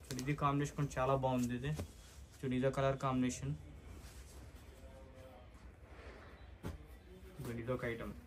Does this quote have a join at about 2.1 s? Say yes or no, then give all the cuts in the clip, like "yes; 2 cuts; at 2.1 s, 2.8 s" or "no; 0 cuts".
no; 0 cuts